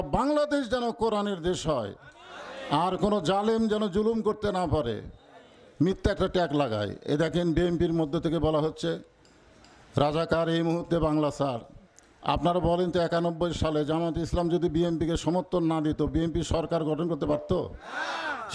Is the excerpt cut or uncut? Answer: uncut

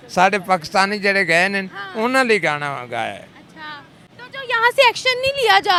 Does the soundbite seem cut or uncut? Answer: uncut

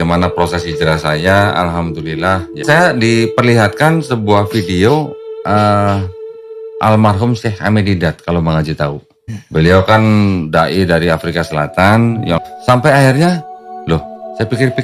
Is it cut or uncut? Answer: uncut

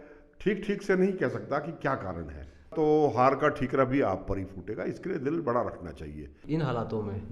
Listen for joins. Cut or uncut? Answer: cut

